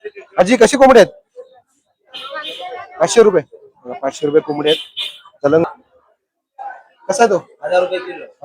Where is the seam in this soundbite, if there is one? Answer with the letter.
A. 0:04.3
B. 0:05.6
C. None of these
B